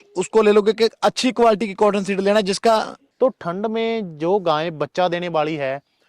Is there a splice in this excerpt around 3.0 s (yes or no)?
yes